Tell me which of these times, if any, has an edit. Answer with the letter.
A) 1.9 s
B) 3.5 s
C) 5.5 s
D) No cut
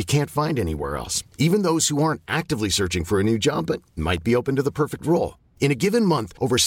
D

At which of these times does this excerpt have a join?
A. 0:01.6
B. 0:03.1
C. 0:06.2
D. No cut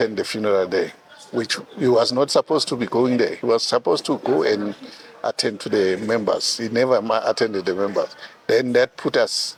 D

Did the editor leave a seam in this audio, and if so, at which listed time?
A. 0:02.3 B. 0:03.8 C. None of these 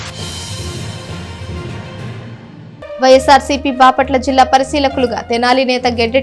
A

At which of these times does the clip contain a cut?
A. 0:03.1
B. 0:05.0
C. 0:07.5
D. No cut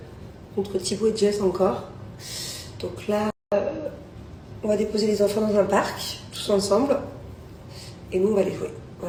D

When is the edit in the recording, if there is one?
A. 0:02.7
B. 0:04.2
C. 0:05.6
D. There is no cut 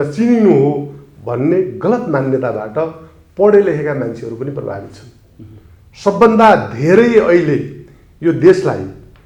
D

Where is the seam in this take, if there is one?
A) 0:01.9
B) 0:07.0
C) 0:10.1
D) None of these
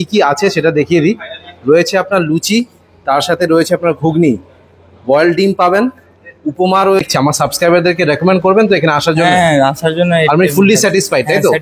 B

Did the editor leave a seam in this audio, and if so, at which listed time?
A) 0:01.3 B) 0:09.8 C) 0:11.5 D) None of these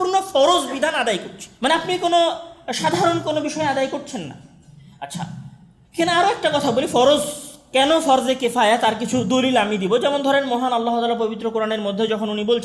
D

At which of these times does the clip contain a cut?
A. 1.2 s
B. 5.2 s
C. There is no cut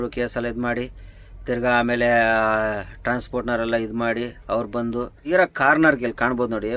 B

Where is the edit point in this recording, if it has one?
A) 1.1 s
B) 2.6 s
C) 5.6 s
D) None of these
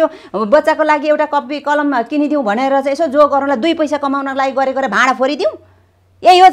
D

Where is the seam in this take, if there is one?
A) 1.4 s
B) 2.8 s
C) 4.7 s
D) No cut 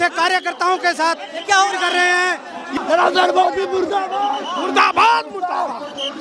B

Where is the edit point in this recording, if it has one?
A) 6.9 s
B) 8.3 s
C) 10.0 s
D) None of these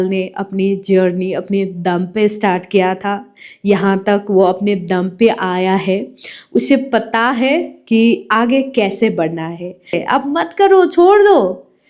C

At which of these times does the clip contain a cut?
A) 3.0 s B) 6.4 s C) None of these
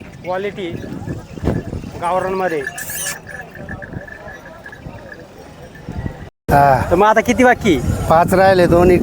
B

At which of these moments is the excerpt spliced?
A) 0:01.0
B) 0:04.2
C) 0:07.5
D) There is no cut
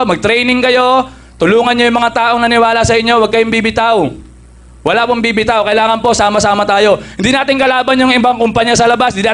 D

